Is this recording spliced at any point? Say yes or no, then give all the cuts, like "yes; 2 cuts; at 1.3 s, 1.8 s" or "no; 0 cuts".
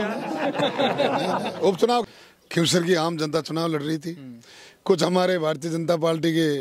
yes; 1 cut; at 2.0 s